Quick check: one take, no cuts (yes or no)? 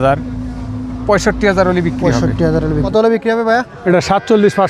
no